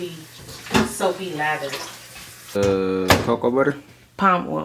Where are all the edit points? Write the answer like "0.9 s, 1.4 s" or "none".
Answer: none